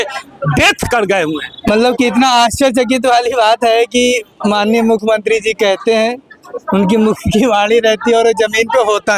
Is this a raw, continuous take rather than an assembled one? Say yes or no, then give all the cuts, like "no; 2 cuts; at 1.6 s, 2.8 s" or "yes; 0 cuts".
yes; 0 cuts